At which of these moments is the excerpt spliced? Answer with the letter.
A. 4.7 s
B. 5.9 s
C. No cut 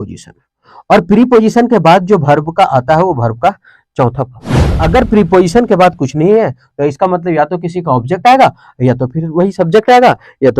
A